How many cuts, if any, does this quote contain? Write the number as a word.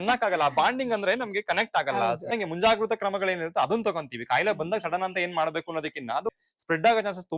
two